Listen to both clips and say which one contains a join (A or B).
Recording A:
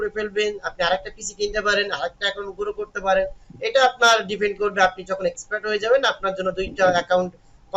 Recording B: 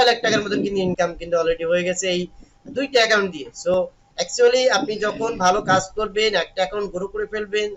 B